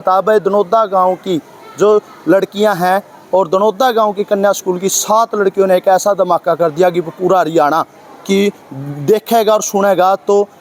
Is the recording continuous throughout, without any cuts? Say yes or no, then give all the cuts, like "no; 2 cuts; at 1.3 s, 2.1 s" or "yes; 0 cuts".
yes; 0 cuts